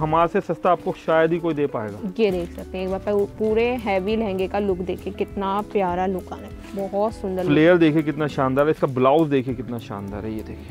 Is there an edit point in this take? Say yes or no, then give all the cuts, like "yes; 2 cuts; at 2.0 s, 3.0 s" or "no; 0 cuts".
no; 0 cuts